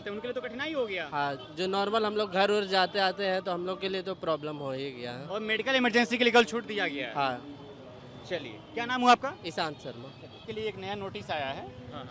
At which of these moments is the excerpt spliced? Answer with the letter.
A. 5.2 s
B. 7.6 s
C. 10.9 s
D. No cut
D